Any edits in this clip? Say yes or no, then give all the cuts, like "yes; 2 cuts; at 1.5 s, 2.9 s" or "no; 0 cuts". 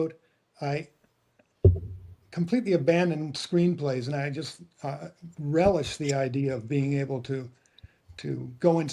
no; 0 cuts